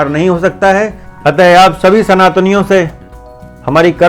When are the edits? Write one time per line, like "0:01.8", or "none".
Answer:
0:01.0